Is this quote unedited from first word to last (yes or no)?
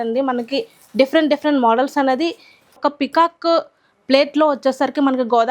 no